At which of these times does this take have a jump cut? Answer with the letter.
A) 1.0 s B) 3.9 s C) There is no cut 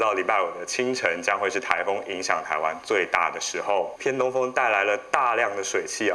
B